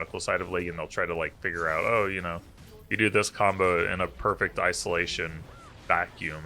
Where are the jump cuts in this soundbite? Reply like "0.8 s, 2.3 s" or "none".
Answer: none